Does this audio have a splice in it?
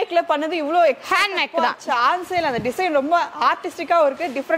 no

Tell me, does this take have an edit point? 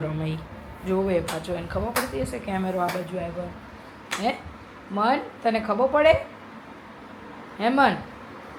no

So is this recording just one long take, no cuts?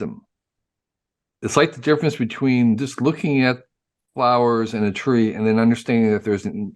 no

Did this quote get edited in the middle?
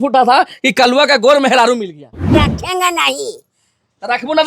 yes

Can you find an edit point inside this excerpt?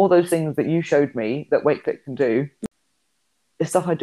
yes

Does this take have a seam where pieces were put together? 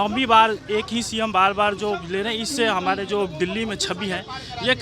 no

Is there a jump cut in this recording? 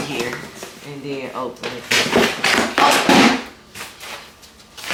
no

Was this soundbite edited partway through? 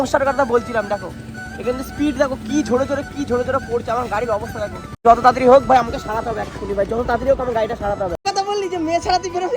yes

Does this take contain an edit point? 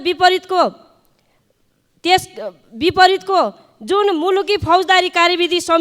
no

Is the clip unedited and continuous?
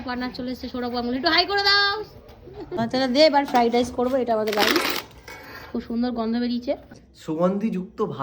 no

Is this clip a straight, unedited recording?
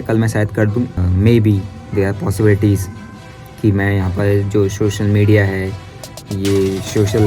no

